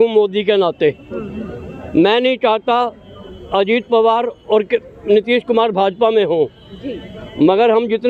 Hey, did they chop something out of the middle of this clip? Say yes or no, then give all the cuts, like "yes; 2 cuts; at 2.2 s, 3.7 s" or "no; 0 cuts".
no; 0 cuts